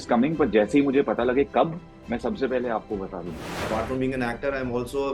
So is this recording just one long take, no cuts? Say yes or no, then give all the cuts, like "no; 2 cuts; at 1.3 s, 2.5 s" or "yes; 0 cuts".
no; 1 cut; at 3.5 s